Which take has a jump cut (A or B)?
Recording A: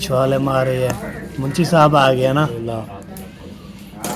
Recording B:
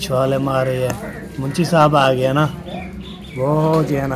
A